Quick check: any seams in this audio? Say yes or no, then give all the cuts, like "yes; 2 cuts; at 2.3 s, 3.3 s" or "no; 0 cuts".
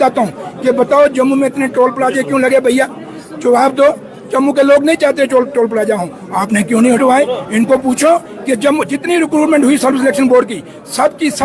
no; 0 cuts